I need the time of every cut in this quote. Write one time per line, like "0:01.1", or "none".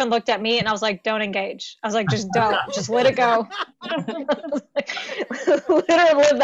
none